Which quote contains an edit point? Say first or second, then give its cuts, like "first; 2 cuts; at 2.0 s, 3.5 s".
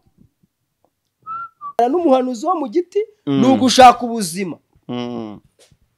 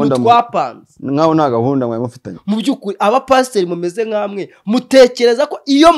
first; 1 cut; at 1.8 s